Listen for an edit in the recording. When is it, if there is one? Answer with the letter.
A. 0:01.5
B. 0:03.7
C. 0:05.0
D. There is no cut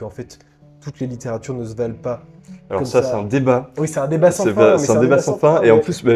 D